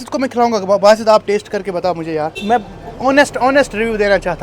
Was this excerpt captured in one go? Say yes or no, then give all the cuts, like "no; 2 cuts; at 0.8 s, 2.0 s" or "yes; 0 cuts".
no; 1 cut; at 2.4 s